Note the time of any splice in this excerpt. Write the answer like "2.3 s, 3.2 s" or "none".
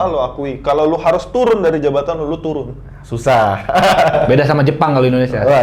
none